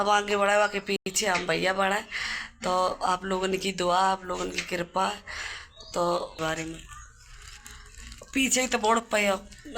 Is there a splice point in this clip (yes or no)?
yes